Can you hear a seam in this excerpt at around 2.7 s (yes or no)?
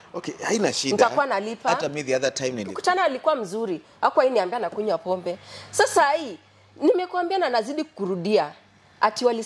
yes